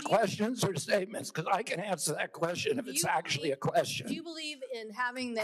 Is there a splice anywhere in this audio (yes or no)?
no